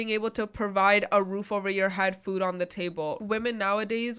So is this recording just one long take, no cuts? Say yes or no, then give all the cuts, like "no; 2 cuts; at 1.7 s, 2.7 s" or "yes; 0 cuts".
no; 1 cut; at 3.2 s